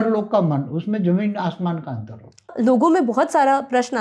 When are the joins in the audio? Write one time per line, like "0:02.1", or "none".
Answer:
0:02.5